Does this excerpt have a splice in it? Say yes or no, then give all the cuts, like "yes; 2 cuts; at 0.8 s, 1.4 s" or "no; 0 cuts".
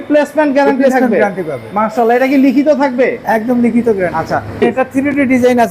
yes; 1 cut; at 4.6 s